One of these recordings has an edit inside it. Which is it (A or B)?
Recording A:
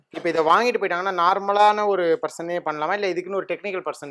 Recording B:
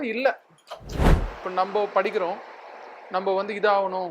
B